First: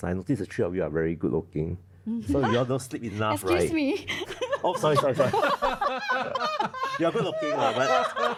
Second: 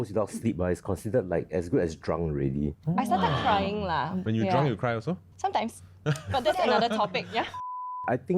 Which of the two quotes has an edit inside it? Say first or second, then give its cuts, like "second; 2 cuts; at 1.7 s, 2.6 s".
second; 3 cuts; at 2.8 s, 4.2 s, 7.5 s